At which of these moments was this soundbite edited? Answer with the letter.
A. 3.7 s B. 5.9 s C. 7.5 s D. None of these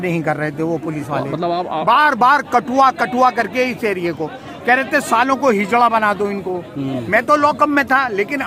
D